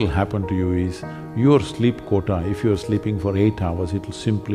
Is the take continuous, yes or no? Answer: yes